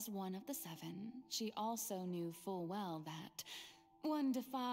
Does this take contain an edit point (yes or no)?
no